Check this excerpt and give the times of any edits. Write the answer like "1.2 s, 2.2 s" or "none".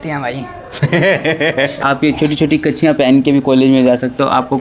1.8 s